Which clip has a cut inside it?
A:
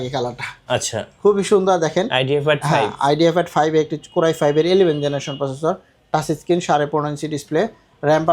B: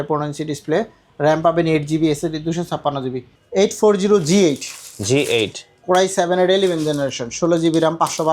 B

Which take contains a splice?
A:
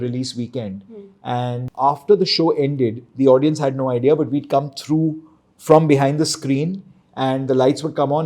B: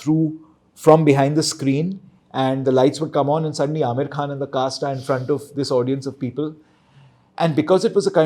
A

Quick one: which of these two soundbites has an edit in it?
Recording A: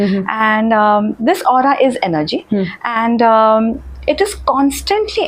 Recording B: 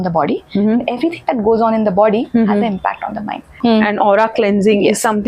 B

